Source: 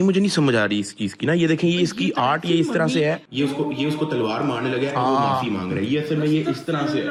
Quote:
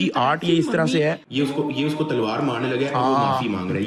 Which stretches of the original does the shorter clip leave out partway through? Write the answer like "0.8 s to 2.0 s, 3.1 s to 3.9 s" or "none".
none